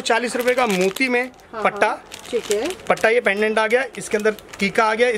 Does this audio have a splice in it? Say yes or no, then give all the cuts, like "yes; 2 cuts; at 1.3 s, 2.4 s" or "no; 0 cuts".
no; 0 cuts